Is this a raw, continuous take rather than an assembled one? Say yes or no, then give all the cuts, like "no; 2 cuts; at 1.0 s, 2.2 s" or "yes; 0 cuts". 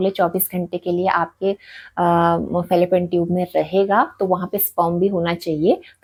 yes; 0 cuts